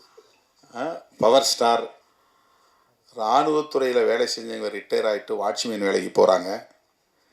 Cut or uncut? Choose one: cut